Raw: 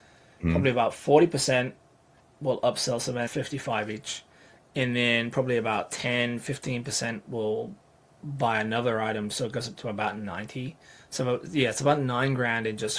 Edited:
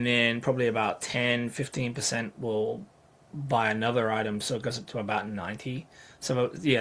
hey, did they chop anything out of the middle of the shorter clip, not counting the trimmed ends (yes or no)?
no